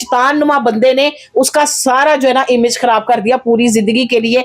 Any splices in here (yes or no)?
no